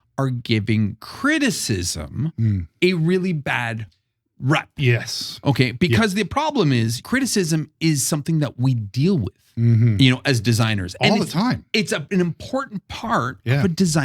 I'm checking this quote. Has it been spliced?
no; 0 cuts

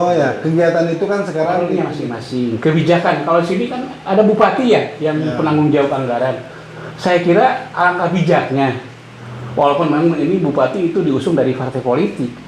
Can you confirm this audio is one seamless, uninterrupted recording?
no; 1 cut; at 1.7 s

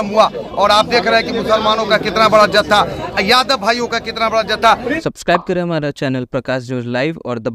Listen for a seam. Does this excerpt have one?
yes; 1 cut; at 5.0 s

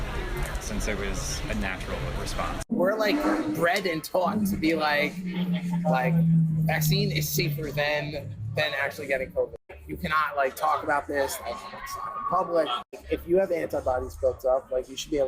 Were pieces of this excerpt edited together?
yes; 3 cuts; at 2.7 s, 9.7 s, 12.9 s

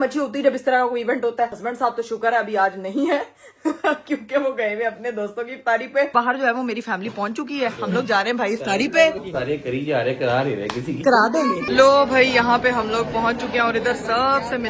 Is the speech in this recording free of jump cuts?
no; 4 cuts; at 1.6 s, 6.1 s, 9.2 s, 11.6 s

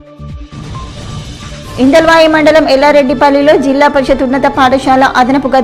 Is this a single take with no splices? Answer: yes; 0 cuts

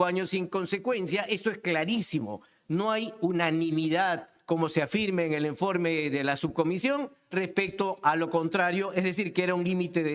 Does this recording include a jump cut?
no; 0 cuts

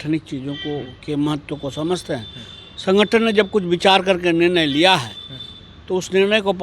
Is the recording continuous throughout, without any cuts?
yes; 0 cuts

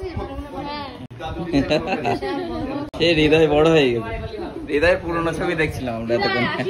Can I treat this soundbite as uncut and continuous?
yes; 0 cuts

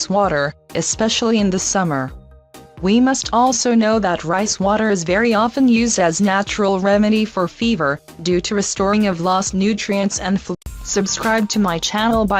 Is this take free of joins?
yes; 0 cuts

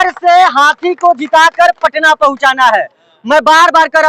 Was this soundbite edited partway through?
no; 0 cuts

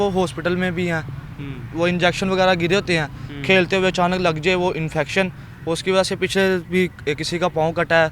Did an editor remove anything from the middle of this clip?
no; 0 cuts

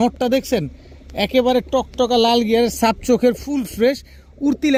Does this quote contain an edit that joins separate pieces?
no; 0 cuts

